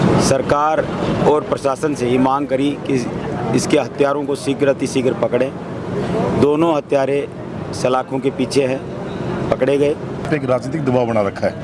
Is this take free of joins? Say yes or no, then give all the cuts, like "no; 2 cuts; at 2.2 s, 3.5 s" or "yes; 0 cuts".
no; 1 cut; at 10.3 s